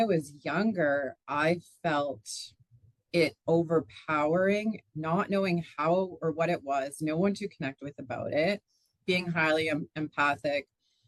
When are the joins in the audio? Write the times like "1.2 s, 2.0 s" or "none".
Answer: none